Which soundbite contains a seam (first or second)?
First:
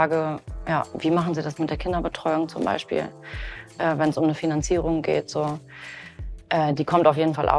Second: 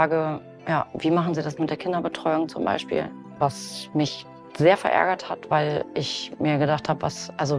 second